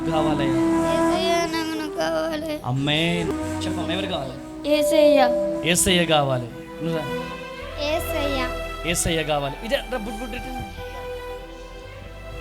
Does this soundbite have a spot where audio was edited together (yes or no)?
yes